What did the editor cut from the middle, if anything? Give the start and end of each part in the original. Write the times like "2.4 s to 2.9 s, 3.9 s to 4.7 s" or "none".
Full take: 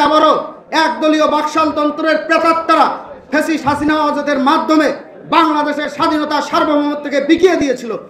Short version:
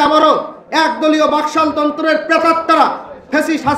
none